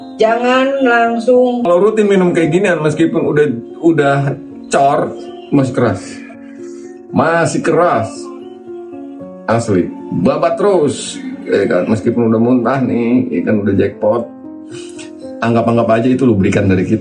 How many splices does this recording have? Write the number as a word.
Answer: one